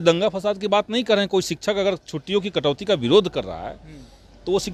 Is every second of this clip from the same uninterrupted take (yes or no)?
yes